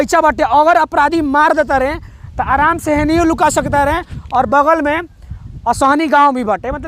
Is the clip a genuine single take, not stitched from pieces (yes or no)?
yes